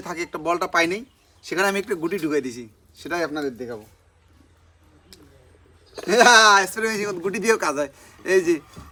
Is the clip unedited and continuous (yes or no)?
yes